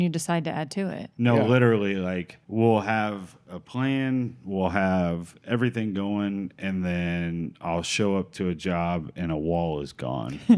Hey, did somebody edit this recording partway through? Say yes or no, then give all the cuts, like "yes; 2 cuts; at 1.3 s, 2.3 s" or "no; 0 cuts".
yes; 1 cut; at 2.4 s